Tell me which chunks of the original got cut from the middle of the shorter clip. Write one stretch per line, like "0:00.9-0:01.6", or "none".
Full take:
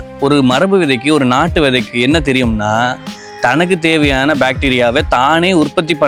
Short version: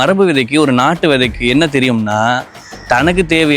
none